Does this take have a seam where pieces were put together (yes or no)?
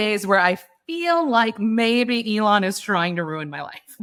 no